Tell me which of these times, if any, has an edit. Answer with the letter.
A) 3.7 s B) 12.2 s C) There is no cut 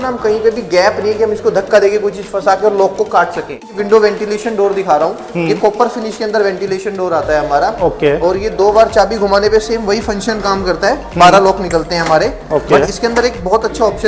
A